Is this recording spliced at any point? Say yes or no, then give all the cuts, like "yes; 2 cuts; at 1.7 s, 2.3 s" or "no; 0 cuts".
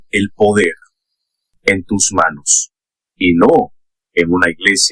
no; 0 cuts